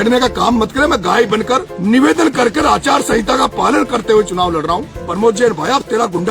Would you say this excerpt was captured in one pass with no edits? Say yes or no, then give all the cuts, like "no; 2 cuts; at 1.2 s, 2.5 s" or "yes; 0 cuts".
no; 2 cuts; at 1.7 s, 5.0 s